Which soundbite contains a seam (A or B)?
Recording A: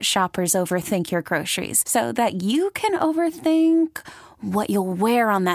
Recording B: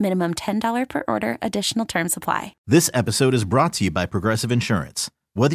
B